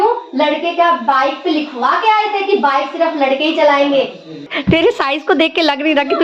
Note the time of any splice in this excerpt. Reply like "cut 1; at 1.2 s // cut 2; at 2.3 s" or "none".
cut 1; at 4.5 s

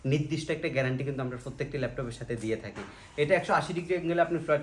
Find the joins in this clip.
none

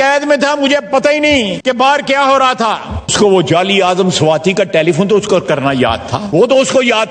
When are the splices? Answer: cut 1; at 1.5 s // cut 2; at 3.1 s // cut 3; at 6.2 s

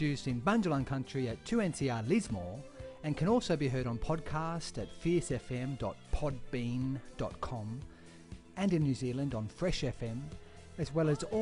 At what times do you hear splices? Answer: none

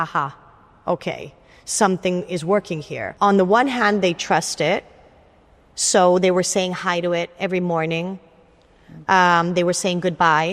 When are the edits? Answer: cut 1; at 3.0 s

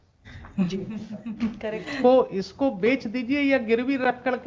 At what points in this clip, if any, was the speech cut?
none

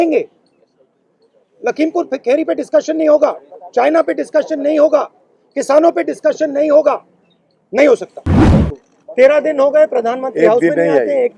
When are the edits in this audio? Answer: cut 1; at 8.4 s

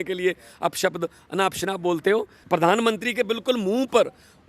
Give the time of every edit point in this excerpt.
cut 1; at 2.4 s

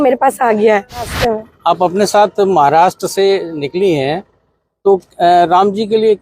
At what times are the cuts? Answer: cut 1; at 1.1 s

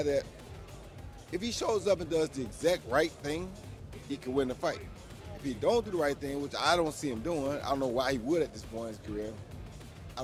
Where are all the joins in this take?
none

